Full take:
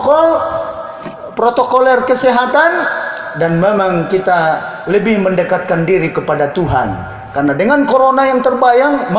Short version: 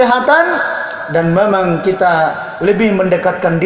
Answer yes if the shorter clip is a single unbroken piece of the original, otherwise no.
yes